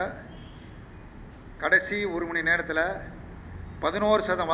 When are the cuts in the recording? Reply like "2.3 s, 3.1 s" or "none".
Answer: none